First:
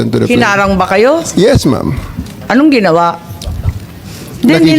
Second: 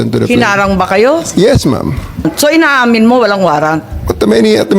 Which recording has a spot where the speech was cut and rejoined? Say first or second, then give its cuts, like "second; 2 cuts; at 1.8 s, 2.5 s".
second; 1 cut; at 2.3 s